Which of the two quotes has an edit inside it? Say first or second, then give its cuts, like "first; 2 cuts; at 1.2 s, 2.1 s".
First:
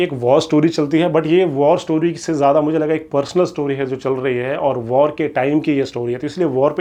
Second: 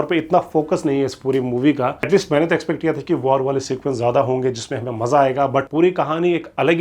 second; 2 cuts; at 2.0 s, 5.7 s